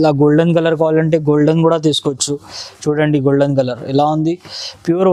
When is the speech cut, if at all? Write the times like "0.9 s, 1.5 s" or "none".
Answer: none